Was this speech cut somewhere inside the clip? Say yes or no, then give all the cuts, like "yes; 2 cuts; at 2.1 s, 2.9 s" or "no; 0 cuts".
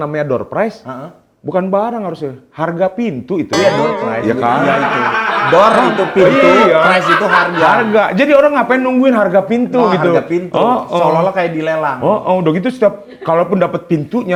no; 0 cuts